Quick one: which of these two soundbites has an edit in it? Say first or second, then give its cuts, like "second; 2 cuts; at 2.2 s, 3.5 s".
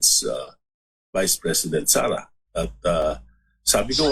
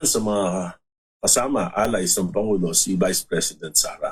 first; 1 cut; at 2.4 s